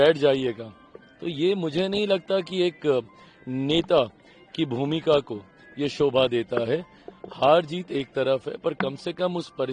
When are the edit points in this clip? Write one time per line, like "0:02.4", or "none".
none